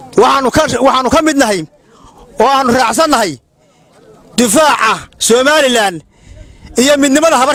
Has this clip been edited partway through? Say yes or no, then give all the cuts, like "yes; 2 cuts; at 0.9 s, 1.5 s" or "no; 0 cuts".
no; 0 cuts